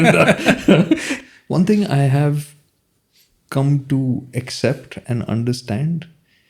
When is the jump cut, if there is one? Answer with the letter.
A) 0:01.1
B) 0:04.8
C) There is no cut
A